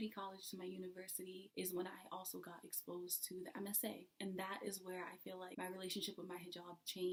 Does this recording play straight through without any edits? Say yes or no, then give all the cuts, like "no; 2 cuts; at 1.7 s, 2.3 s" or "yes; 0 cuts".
yes; 0 cuts